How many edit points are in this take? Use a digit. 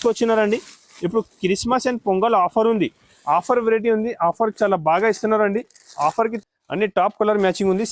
1